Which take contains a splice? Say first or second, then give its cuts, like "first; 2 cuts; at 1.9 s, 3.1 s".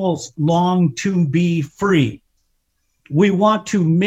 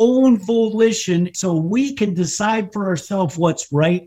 second; 1 cut; at 1.3 s